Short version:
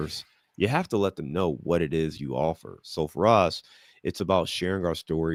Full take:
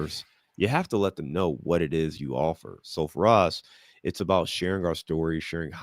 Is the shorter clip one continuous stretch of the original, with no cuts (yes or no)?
yes